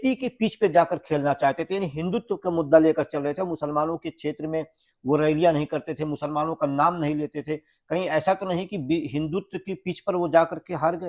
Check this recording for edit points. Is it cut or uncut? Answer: uncut